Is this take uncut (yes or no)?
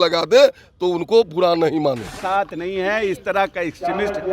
no